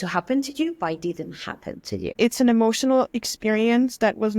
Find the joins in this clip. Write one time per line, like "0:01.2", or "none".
0:02.1